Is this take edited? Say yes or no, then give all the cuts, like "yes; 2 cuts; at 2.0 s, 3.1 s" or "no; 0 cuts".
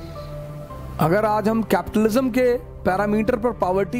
yes; 1 cut; at 0.9 s